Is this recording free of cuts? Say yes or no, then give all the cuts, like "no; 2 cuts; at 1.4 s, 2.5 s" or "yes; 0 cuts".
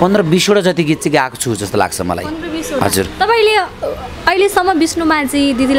yes; 0 cuts